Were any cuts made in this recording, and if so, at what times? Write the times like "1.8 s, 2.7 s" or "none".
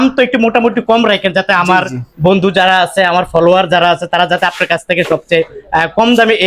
none